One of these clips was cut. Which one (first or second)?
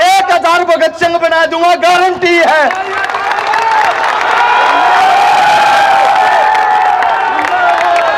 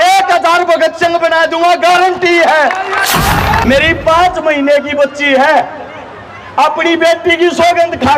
second